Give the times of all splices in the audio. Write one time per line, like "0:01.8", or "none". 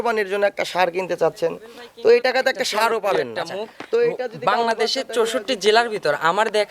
0:04.4